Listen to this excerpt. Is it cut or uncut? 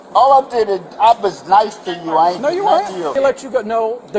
cut